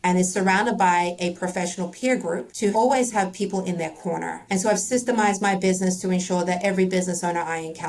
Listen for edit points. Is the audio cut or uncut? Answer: cut